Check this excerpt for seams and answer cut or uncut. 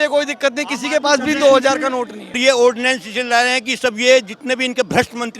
cut